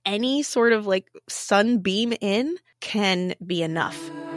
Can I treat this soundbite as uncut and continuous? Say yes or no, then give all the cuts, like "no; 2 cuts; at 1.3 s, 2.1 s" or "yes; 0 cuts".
yes; 0 cuts